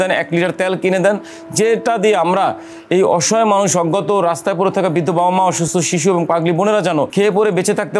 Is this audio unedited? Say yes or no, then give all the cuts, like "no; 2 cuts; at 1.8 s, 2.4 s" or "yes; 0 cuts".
no; 1 cut; at 7.1 s